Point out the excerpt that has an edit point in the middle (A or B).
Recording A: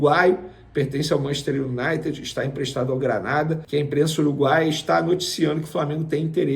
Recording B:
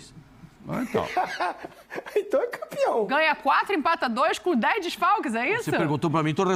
A